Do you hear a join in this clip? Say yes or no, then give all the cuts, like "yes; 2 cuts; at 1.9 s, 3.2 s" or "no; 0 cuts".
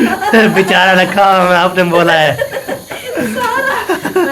no; 0 cuts